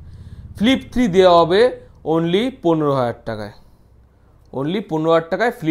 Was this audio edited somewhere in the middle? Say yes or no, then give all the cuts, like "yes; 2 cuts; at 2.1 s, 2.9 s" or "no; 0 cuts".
no; 0 cuts